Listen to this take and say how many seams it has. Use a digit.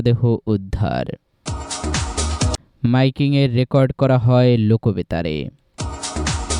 1